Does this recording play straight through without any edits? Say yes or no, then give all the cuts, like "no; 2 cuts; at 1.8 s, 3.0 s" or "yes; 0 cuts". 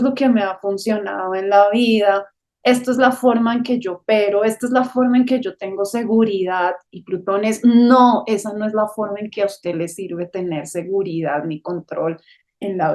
yes; 0 cuts